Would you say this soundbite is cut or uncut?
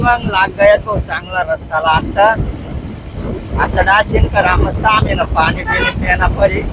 uncut